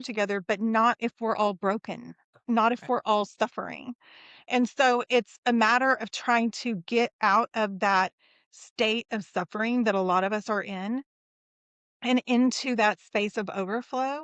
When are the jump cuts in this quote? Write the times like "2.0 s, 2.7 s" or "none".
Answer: none